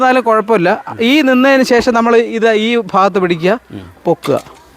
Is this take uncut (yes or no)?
yes